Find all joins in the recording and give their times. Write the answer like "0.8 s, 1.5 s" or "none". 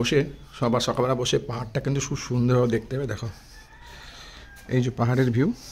none